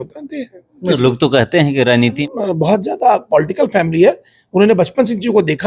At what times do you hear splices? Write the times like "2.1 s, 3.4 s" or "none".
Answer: 2.2 s